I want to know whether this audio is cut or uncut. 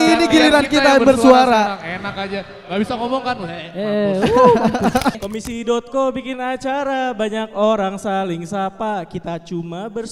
cut